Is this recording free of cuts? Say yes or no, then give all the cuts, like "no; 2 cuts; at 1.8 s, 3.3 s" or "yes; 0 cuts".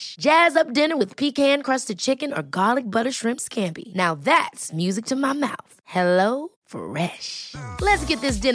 yes; 0 cuts